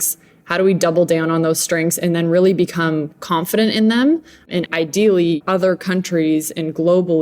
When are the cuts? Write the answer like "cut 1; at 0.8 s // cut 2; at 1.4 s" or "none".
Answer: cut 1; at 4.7 s // cut 2; at 5.4 s